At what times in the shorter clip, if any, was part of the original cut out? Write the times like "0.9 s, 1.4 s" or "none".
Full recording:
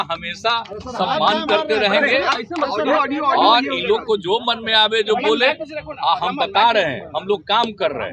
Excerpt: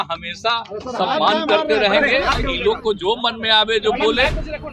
2.5 s